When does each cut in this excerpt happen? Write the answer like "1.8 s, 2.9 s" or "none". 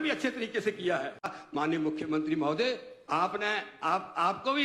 1.4 s